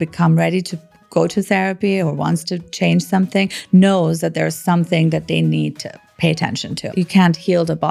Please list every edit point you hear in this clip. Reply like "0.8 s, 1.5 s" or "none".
6.9 s